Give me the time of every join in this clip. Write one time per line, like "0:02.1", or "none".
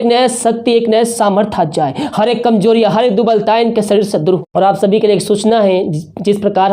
0:04.4